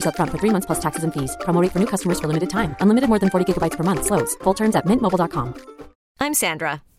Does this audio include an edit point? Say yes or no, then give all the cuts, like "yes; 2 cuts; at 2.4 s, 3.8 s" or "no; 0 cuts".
no; 0 cuts